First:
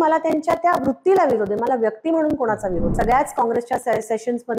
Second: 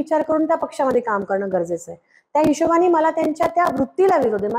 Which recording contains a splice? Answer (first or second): first